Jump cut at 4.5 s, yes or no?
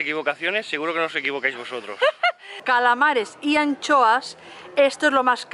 no